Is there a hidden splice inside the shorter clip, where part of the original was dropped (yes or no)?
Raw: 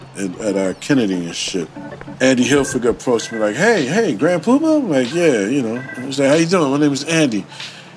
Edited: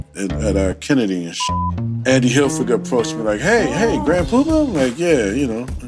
yes